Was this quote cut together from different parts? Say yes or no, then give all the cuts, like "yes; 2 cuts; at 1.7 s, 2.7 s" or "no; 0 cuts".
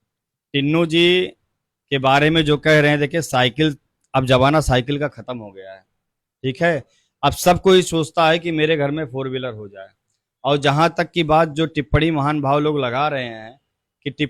no; 0 cuts